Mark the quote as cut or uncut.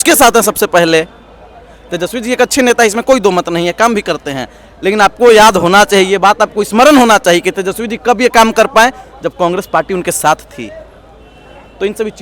uncut